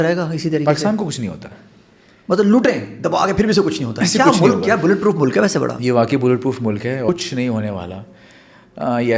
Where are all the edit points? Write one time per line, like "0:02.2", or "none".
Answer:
0:07.1

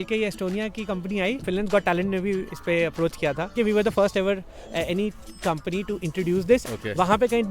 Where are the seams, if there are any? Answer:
0:01.4
0:03.5
0:06.7

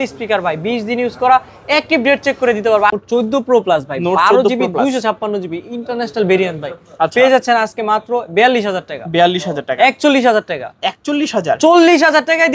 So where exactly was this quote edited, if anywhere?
0:03.0

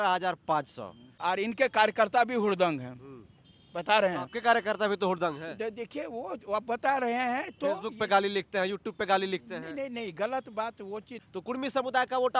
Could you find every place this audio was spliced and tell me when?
0:01.1
0:11.2

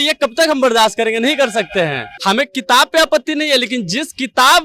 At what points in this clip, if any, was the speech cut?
0:02.1

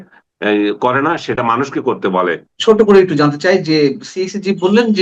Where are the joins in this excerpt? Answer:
0:02.5

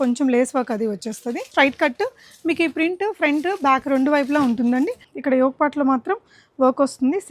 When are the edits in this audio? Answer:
0:01.5
0:05.1

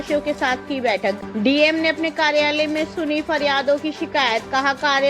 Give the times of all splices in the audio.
0:01.2

